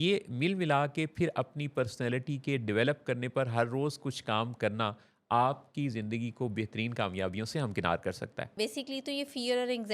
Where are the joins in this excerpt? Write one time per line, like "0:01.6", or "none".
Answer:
0:08.5